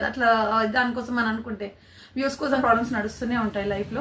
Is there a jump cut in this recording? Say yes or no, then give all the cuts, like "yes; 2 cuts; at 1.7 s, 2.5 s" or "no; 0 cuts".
yes; 1 cut; at 2.6 s